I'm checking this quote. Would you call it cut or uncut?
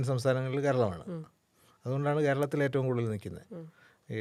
uncut